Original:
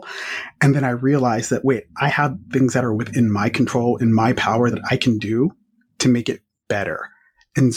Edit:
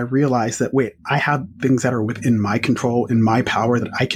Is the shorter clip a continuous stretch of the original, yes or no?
yes